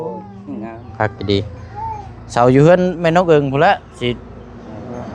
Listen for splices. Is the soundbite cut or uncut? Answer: uncut